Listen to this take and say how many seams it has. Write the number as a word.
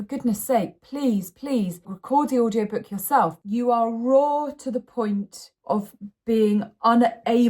two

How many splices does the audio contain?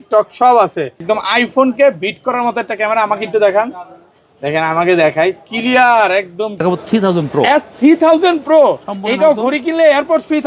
two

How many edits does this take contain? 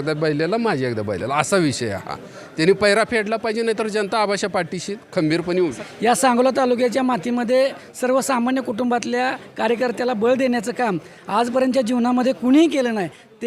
one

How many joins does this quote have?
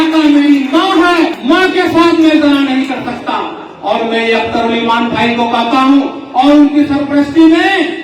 one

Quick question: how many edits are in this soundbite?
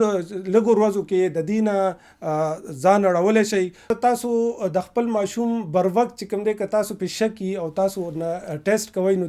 one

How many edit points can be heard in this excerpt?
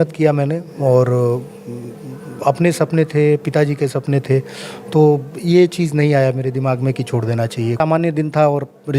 one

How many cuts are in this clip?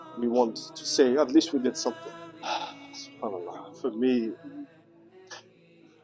one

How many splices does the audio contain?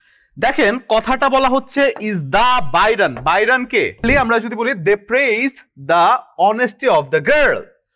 one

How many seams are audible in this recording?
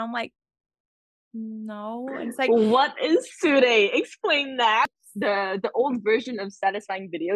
one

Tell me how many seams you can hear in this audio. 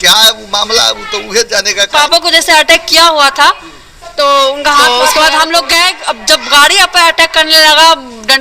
two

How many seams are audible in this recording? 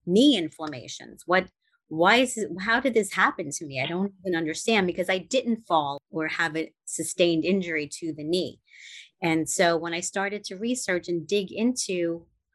one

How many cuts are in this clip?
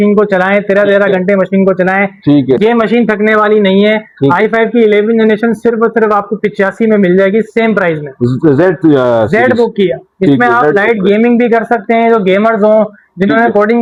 zero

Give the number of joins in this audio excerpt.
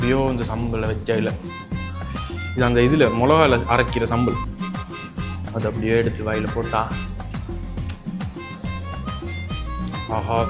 zero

